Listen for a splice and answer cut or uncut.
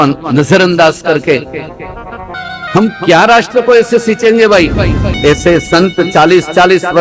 cut